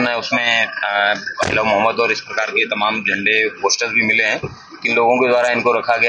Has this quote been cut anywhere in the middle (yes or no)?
no